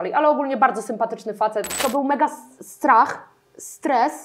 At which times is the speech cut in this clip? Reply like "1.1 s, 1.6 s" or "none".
1.7 s